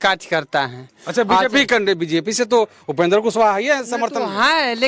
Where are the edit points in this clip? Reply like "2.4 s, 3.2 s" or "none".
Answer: none